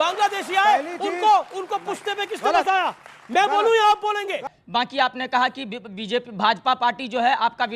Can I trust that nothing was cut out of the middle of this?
no; 1 cut; at 4.6 s

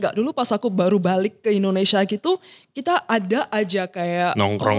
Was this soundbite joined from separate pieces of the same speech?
no; 0 cuts

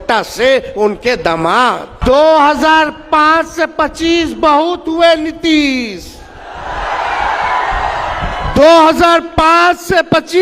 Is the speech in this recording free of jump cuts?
no; 1 cut; at 1.9 s

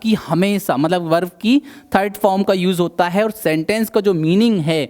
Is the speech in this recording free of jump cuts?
yes; 0 cuts

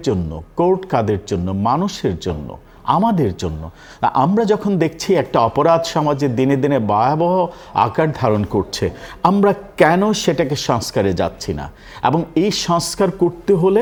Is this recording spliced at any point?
no; 0 cuts

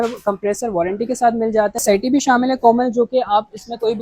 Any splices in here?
yes; 1 cut; at 1.8 s

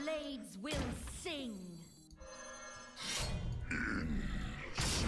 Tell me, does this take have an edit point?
yes; 2 cuts; at 2.0 s, 4.3 s

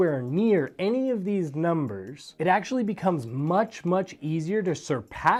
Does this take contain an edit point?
no; 0 cuts

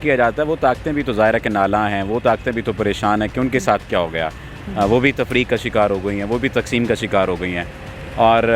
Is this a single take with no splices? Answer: yes; 0 cuts

